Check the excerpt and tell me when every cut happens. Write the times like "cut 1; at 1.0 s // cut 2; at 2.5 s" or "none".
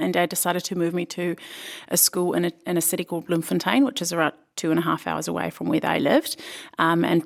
none